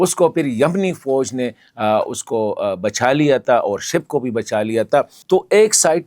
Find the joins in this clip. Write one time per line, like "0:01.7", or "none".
0:05.2